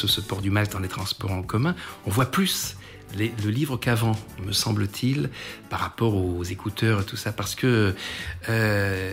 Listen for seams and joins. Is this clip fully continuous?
yes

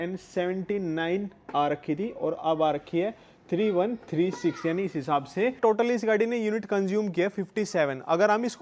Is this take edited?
no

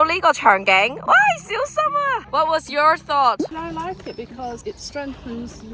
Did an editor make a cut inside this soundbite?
no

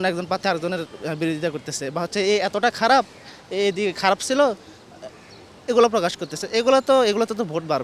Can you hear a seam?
no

